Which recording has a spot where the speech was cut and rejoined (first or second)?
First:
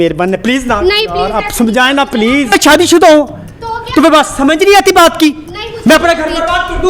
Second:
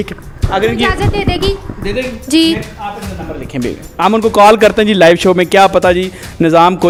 first